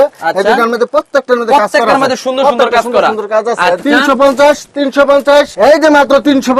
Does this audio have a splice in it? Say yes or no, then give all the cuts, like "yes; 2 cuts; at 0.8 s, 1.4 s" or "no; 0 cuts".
yes; 2 cuts; at 3.8 s, 5.5 s